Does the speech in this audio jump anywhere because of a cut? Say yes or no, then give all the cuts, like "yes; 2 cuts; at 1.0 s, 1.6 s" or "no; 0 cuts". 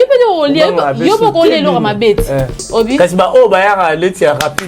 yes; 1 cut; at 2.5 s